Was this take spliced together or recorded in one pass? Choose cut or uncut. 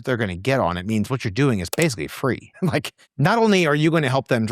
uncut